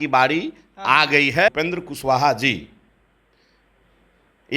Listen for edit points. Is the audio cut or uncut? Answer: cut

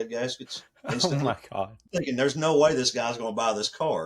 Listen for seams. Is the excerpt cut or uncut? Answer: cut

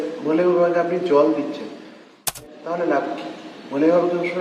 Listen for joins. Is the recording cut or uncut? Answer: cut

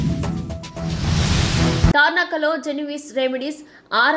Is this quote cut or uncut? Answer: uncut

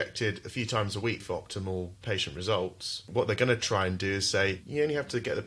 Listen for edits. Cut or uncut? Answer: cut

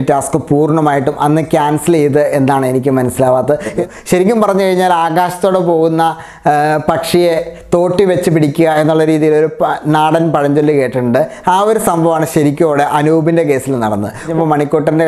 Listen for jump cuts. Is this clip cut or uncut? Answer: cut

